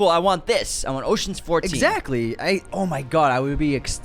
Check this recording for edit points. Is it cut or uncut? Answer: uncut